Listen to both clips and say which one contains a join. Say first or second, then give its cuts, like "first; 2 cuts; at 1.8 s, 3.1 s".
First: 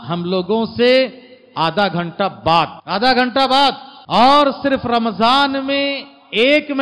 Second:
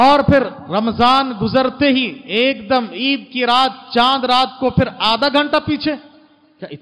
first; 2 cuts; at 2.8 s, 3.9 s